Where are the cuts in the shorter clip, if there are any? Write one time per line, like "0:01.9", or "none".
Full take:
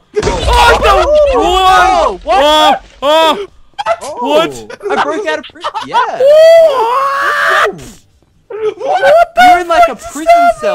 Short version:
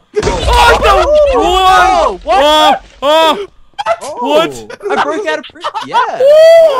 none